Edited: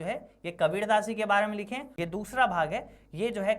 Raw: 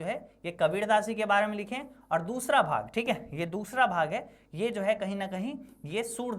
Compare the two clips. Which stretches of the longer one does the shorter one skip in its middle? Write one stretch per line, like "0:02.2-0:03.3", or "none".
0:01.9-0:03.3